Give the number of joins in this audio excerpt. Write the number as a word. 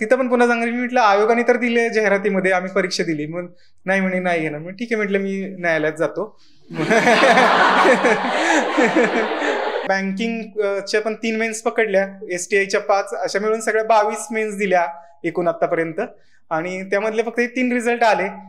one